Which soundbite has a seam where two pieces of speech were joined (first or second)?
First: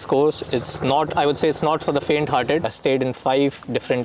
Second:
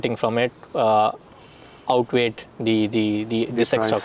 first